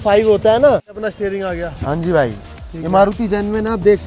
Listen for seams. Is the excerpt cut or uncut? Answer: cut